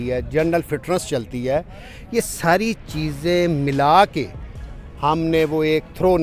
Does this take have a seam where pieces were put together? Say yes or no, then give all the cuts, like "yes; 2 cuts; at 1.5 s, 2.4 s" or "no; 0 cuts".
no; 0 cuts